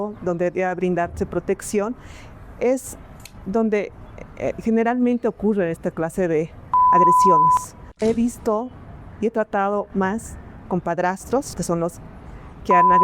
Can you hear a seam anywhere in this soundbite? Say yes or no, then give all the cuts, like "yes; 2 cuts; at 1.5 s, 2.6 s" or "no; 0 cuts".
yes; 2 cuts; at 8.0 s, 11.6 s